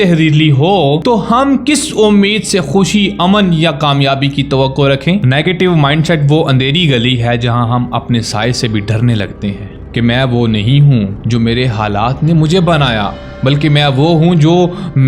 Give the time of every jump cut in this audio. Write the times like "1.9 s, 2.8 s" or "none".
1.0 s, 5.2 s, 9.7 s